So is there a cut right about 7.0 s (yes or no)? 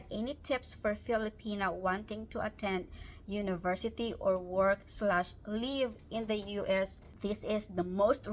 yes